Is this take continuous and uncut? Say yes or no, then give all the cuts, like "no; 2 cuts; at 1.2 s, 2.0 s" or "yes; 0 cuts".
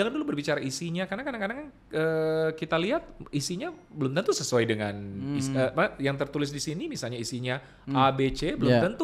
yes; 0 cuts